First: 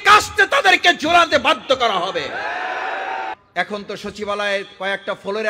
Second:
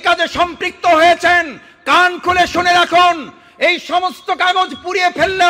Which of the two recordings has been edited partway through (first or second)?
first